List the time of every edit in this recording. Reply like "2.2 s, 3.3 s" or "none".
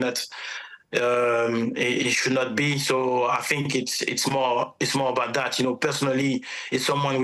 none